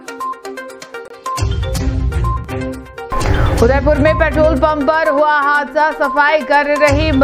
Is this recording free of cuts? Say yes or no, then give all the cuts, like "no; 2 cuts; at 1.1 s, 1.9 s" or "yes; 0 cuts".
yes; 0 cuts